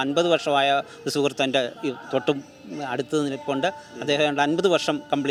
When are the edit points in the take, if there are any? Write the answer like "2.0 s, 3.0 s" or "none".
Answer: none